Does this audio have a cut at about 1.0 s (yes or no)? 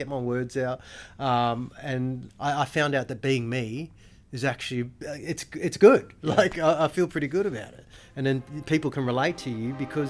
no